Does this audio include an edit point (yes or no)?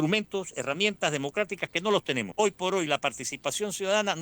yes